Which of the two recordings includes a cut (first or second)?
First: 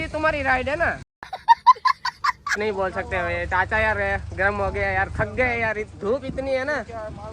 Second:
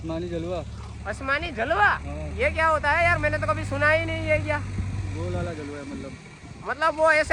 first